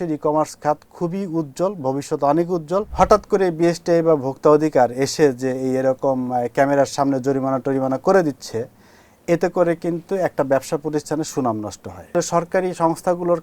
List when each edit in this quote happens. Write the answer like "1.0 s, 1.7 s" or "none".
2.9 s, 12.1 s